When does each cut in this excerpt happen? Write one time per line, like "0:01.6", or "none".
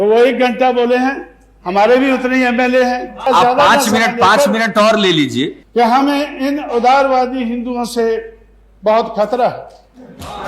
0:03.2
0:05.6